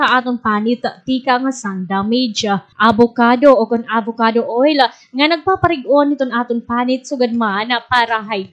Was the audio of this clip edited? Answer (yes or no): no